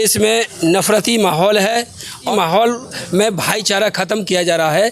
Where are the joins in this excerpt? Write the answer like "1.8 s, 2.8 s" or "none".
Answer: 2.3 s